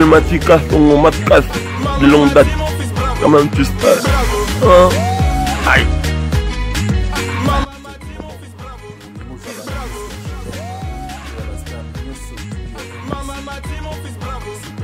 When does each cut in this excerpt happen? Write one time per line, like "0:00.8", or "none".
none